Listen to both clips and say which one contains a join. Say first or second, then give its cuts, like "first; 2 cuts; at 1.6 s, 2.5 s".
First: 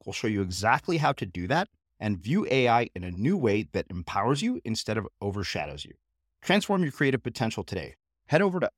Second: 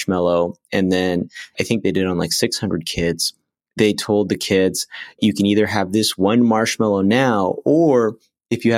second; 2 cuts; at 1.5 s, 5.2 s